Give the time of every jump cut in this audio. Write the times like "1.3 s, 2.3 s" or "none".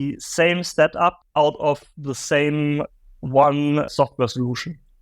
1.2 s, 3.9 s